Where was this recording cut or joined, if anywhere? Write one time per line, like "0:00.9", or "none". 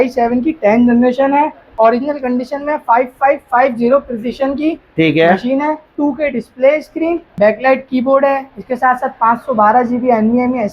0:01.6
0:05.9
0:07.3